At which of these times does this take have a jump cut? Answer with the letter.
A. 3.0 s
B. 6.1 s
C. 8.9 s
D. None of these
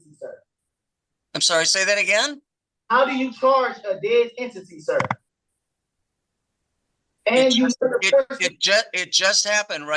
D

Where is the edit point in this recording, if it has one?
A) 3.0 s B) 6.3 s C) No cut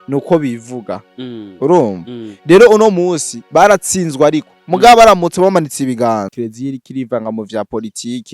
B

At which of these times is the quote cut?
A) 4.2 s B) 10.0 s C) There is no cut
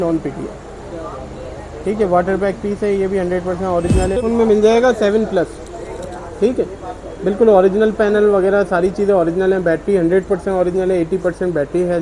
A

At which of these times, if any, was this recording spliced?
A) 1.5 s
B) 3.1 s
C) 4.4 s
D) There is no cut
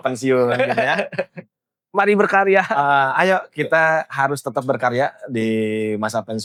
D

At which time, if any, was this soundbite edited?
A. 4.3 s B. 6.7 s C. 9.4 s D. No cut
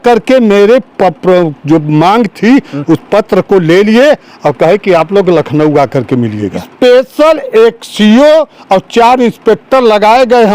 B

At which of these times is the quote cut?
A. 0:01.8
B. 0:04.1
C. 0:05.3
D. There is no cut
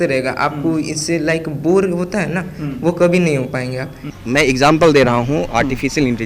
B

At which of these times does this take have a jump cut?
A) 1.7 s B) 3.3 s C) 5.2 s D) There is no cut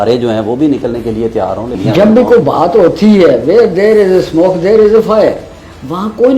A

